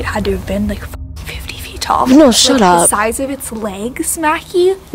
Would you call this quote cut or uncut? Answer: uncut